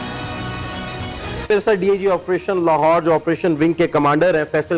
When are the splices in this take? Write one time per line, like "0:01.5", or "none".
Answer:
0:01.5